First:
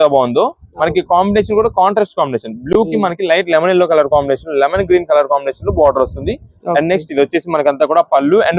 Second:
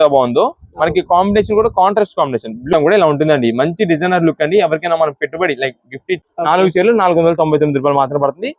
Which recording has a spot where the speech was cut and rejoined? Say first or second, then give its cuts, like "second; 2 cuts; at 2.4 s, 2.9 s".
second; 2 cuts; at 2.7 s, 6.2 s